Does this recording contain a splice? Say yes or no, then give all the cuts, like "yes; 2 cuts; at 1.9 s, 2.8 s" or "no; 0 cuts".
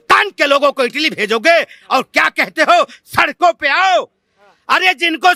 no; 0 cuts